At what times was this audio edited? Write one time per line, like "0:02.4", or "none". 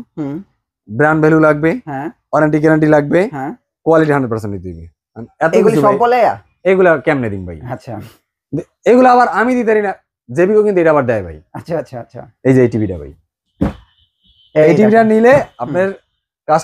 none